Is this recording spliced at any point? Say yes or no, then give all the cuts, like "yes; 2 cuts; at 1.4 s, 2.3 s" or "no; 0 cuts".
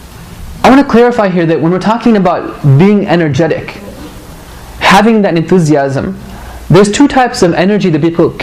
no; 0 cuts